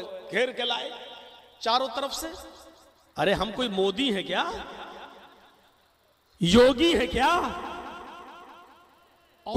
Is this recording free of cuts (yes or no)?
yes